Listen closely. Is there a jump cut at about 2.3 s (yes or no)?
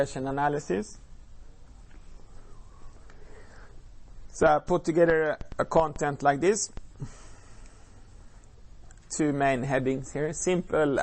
no